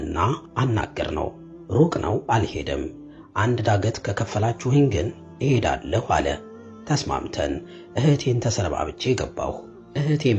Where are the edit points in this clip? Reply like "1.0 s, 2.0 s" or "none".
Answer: none